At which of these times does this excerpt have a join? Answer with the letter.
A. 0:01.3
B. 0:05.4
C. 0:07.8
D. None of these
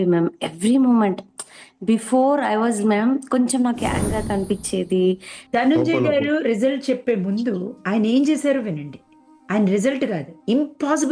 B